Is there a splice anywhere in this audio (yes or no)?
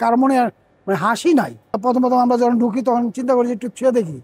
yes